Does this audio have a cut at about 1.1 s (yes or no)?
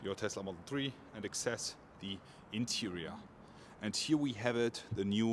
no